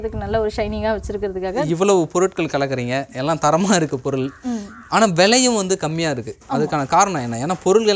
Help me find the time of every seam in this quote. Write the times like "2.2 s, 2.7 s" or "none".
1.7 s